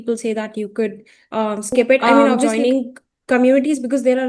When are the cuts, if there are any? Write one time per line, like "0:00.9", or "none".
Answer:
0:02.5

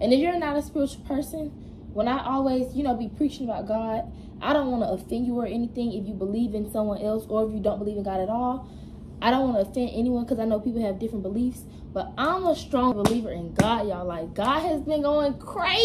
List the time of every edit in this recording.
0:13.0

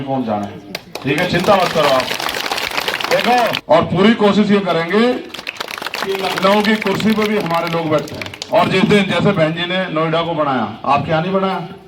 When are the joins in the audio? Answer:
0:03.6

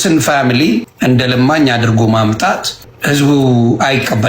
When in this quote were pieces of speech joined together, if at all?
0:00.9
0:02.9

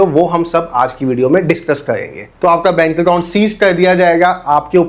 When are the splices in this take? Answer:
0:02.2

